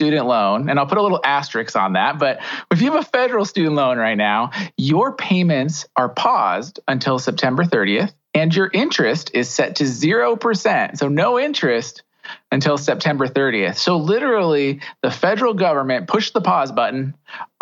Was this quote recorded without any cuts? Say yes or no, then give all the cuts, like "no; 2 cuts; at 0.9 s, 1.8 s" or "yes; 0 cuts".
yes; 0 cuts